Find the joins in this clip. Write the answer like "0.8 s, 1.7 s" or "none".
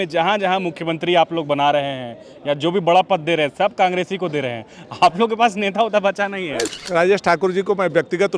6.7 s